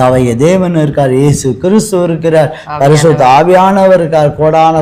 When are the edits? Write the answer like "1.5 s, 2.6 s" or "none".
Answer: none